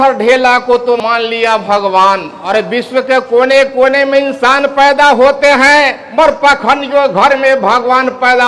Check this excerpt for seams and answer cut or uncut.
cut